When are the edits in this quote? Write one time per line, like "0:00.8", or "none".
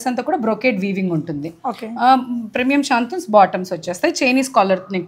none